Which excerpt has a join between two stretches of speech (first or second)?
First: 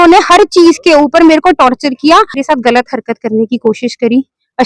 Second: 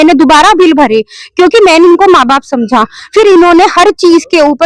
first